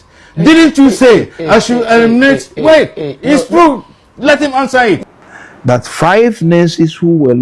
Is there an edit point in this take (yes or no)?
yes